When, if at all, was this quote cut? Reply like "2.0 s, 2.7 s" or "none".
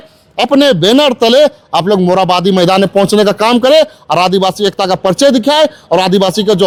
none